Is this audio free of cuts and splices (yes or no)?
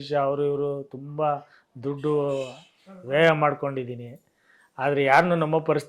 yes